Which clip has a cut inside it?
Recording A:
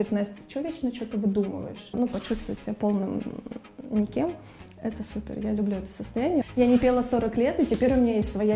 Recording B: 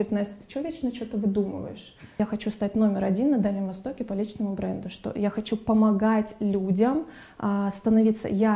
A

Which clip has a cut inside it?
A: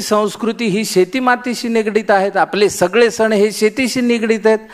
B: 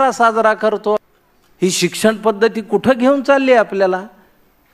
B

